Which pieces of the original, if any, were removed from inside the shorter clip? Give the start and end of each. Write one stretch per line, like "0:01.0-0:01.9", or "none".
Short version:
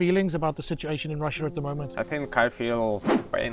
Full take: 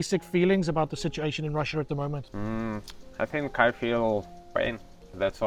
0:02.2-0:03.1